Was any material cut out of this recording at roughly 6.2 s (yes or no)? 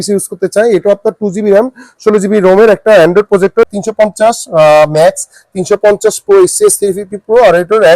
no